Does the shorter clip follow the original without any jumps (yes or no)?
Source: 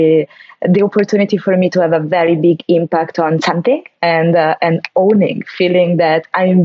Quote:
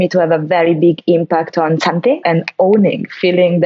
no